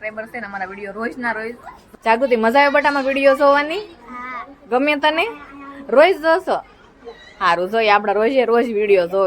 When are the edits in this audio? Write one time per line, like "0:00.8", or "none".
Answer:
0:01.7